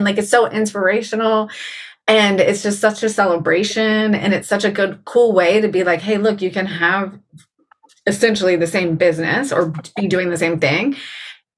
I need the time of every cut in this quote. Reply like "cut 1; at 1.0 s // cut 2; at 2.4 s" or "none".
none

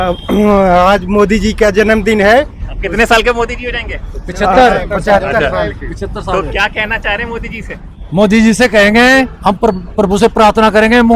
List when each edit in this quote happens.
none

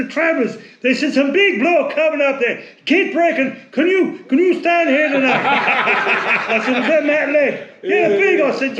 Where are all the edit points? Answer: none

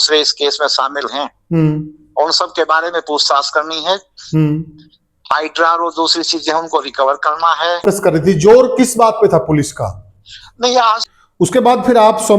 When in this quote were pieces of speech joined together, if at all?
cut 1; at 7.8 s // cut 2; at 11.0 s

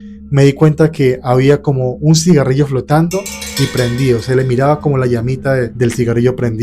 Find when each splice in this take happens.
cut 1; at 5.7 s

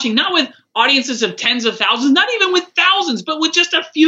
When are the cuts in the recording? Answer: none

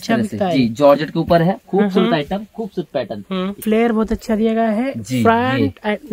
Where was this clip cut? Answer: cut 1; at 3.6 s

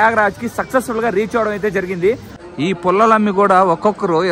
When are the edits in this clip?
cut 1; at 2.4 s

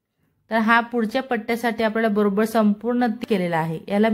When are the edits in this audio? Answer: cut 1; at 3.2 s

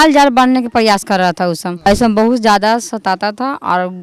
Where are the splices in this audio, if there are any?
cut 1; at 1.7 s

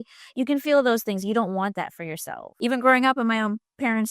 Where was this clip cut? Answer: cut 1; at 2.4 s

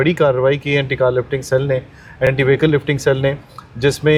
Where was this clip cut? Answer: none

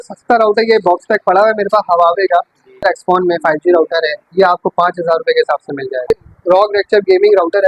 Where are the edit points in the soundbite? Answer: cut 1; at 2.8 s // cut 2; at 6.1 s

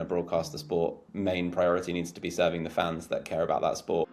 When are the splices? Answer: cut 1; at 1.1 s

